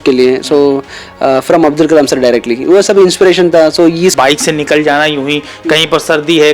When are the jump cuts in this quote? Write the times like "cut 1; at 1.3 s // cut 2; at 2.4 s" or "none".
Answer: cut 1; at 4.2 s